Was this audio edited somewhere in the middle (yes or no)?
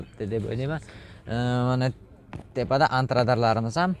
no